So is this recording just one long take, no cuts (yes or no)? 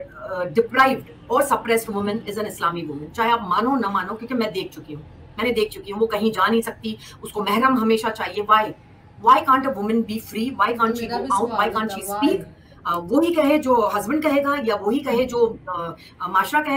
yes